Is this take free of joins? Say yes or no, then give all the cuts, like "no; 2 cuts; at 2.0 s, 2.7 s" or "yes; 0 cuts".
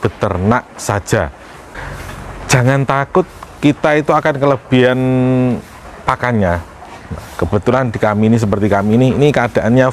no; 1 cut; at 1.6 s